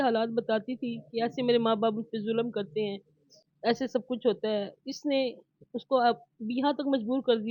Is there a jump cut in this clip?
no; 0 cuts

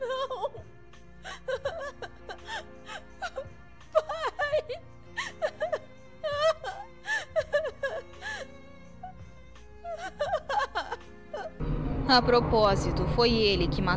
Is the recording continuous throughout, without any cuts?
no; 1 cut; at 11.6 s

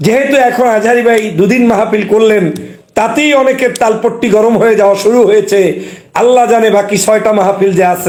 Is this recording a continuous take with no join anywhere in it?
yes; 0 cuts

